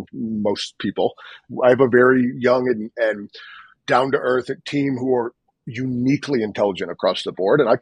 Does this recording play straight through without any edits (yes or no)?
no